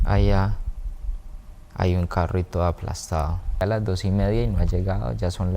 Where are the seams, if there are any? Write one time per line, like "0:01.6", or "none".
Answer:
0:03.6